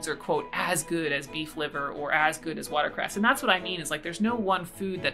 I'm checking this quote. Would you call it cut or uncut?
uncut